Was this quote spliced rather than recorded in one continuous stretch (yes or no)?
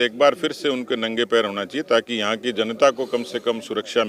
no